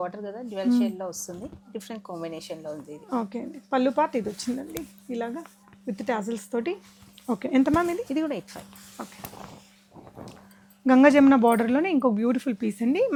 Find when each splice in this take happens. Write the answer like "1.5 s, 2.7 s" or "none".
none